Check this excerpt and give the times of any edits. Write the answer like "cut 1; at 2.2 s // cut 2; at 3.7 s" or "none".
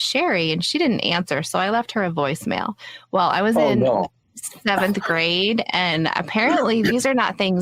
none